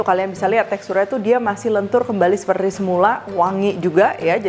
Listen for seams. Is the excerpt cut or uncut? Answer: uncut